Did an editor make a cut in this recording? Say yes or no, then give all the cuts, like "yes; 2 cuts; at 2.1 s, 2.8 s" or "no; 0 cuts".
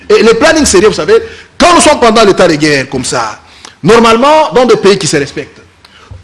yes; 1 cut; at 1.4 s